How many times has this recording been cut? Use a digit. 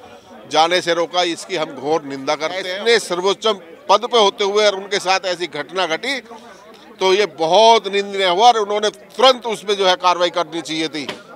1